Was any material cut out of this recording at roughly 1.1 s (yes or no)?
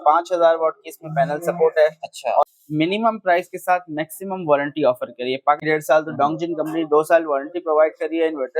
no